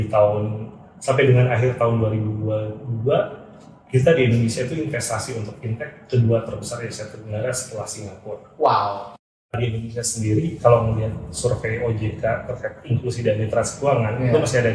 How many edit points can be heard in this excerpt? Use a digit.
1